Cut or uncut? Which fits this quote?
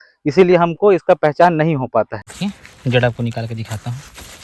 cut